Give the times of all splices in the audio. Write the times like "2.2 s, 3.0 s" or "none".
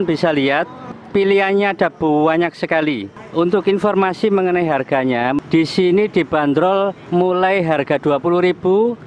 3.2 s, 5.4 s